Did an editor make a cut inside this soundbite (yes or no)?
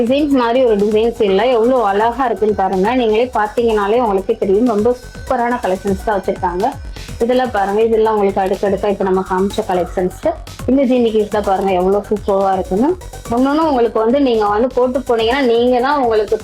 no